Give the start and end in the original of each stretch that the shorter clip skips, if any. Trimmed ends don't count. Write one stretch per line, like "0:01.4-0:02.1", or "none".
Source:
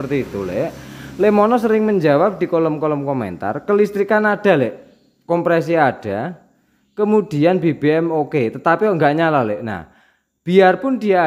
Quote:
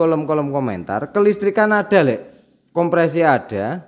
none

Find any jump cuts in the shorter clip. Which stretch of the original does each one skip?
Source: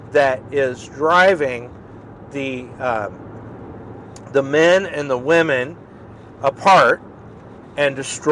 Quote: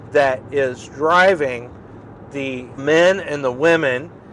0:02.8-0:04.5

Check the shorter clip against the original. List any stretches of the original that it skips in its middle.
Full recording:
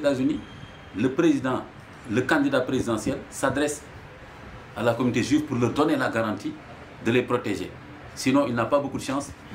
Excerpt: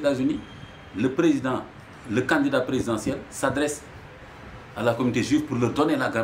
none

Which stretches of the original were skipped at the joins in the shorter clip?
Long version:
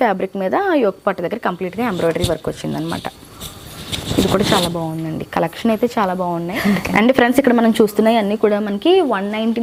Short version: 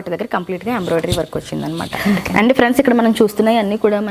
0:03.1-0:06.6

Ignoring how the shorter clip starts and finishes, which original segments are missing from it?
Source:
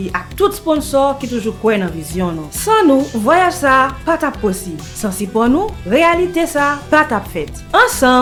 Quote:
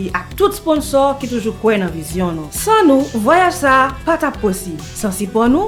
none

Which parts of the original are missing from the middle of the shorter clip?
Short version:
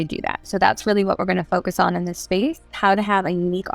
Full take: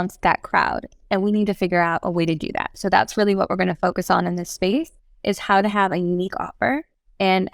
0:05.0-0:05.4

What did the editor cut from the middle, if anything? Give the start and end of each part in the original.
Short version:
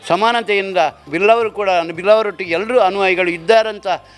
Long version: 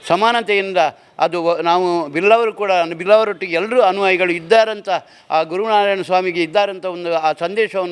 0:01.1-0:02.1

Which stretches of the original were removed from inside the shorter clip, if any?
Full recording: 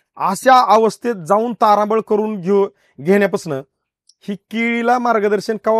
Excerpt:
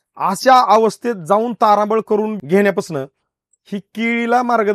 0:02.4-0:02.9

